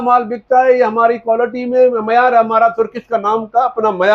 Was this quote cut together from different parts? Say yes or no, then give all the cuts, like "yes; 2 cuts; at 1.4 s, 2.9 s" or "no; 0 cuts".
no; 0 cuts